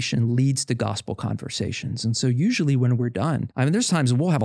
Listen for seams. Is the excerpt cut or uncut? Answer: cut